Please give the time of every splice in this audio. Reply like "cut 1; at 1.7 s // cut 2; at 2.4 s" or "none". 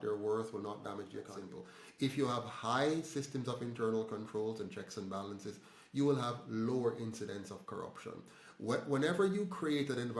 cut 1; at 1.2 s